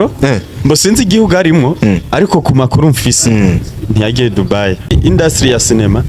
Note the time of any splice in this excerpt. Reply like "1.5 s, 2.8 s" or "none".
4.9 s